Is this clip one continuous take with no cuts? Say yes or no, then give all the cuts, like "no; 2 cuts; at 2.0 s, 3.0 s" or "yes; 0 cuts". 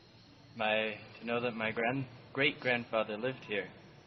yes; 0 cuts